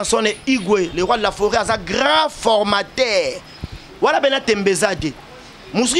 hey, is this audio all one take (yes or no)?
yes